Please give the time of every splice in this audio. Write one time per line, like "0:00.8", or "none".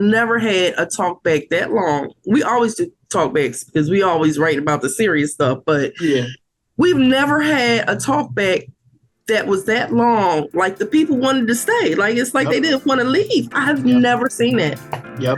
none